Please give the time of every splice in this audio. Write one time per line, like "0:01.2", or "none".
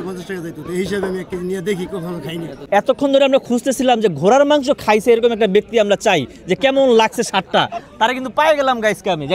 0:02.6